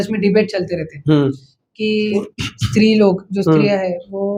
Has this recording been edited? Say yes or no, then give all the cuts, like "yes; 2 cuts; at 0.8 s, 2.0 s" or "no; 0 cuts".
no; 0 cuts